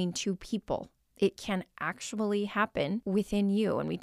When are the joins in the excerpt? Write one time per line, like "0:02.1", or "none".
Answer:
0:01.0
0:03.0